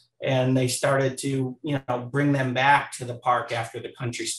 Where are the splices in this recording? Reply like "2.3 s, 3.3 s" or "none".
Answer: none